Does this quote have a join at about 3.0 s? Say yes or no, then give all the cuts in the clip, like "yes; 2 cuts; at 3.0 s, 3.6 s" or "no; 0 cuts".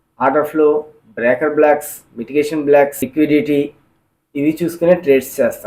yes; 1 cut; at 3.0 s